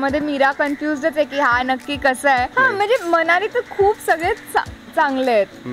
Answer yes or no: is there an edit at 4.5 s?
no